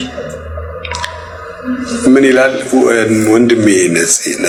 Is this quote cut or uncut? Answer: uncut